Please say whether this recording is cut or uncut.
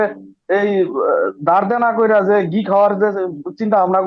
uncut